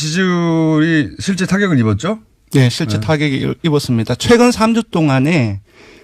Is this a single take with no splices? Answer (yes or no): no